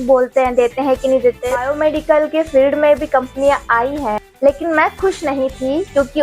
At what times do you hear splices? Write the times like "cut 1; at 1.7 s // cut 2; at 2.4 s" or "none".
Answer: cut 1; at 1.7 s

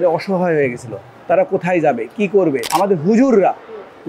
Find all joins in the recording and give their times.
cut 1; at 2.7 s

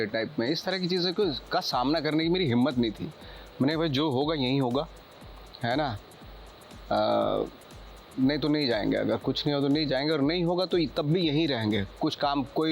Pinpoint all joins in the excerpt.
none

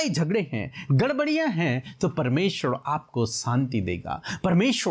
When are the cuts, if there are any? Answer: none

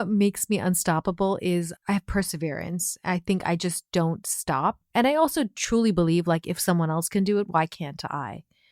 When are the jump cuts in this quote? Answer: cut 1; at 1.7 s

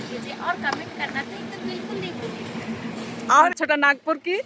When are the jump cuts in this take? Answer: cut 1; at 3.5 s

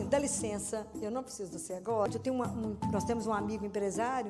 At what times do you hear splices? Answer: cut 1; at 2.1 s

